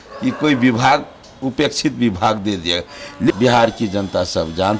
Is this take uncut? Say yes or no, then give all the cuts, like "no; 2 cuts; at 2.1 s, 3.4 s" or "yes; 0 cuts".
no; 1 cut; at 3.3 s